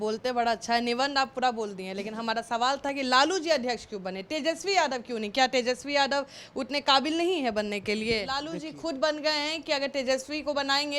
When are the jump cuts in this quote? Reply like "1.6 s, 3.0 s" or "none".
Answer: 8.4 s